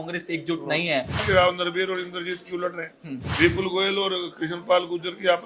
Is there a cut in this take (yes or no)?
yes